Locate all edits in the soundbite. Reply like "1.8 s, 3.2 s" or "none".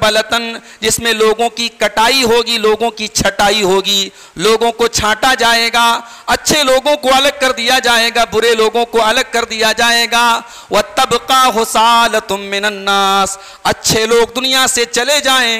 none